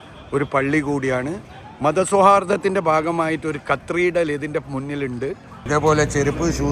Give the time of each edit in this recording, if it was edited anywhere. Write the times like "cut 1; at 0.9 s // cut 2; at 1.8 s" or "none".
cut 1; at 5.6 s